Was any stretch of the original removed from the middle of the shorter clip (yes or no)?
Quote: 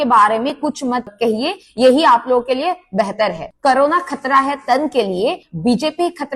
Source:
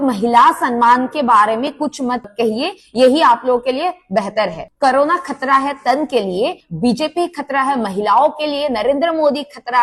no